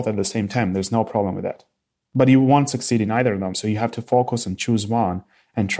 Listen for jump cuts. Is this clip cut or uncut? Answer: cut